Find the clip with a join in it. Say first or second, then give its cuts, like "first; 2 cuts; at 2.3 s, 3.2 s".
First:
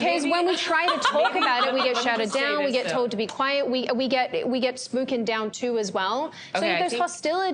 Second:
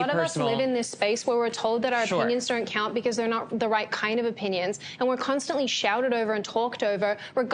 first; 1 cut; at 4.0 s